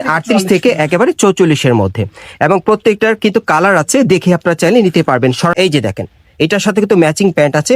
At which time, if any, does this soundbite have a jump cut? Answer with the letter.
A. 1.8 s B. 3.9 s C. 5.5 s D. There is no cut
C